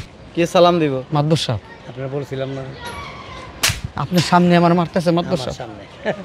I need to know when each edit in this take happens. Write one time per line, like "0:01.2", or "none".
none

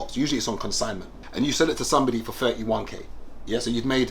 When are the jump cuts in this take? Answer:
0:01.2

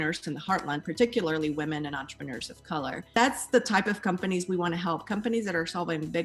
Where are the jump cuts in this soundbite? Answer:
0:03.1

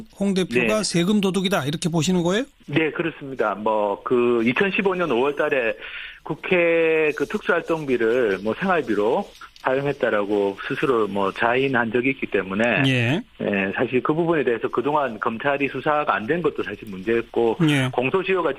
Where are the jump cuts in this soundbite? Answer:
0:12.9

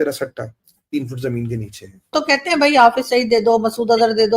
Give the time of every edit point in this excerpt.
0:02.1

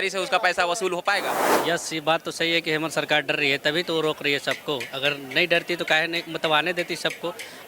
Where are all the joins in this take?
0:01.4

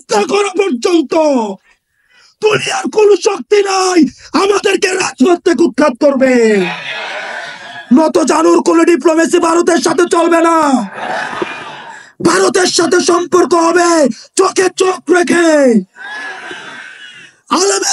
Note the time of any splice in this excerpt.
0:07.7

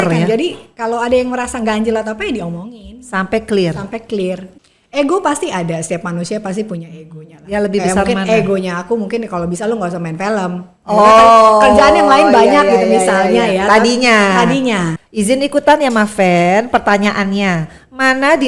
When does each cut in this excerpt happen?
0:04.5
0:14.9

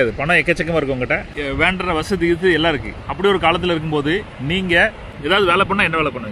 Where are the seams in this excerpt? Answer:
0:01.3
0:05.1

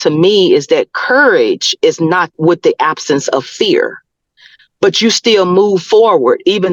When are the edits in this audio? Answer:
0:02.3

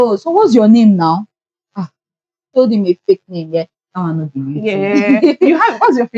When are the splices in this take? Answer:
0:02.5

